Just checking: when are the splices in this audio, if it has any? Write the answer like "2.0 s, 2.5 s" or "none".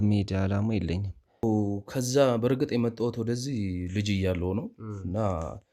1.4 s